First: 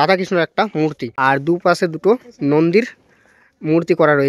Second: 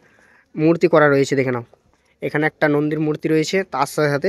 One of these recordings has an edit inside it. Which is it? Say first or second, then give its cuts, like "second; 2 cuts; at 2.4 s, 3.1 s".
first; 1 cut; at 1.1 s